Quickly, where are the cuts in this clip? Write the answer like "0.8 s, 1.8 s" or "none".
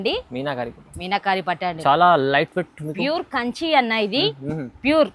none